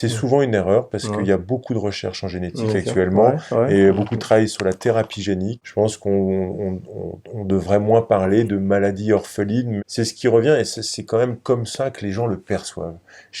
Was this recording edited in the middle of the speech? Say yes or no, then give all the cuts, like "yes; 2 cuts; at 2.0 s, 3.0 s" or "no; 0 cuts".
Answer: yes; 2 cuts; at 5.6 s, 9.7 s